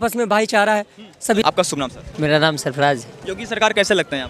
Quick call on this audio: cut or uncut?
cut